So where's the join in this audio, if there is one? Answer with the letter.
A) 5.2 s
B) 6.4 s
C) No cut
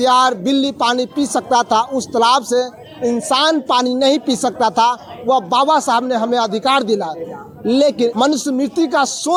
C